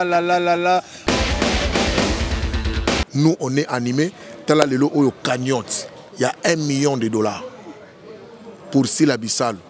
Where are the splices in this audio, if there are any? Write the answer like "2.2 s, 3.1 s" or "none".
0.9 s, 3.0 s

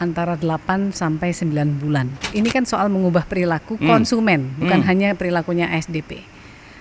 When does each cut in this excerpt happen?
2.3 s

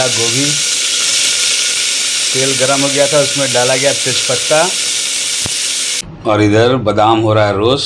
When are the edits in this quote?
6.0 s

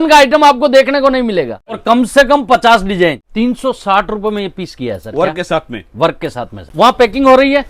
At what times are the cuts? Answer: 1.8 s, 3.2 s, 6.7 s

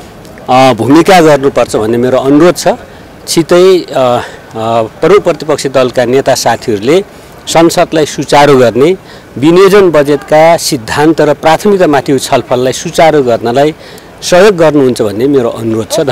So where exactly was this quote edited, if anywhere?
none

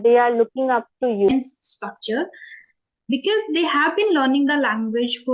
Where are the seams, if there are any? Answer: 1.3 s

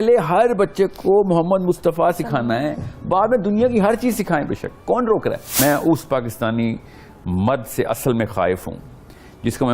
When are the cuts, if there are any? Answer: 5.6 s

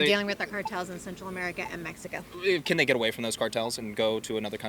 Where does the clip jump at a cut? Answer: none

